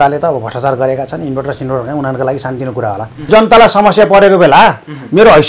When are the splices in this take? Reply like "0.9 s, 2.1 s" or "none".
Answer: 3.3 s